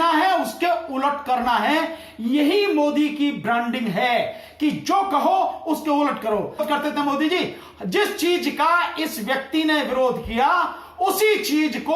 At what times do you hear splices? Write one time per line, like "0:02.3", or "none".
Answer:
0:06.6